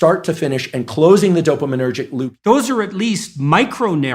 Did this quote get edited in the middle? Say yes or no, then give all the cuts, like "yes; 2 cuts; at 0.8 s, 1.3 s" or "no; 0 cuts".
yes; 1 cut; at 2.2 s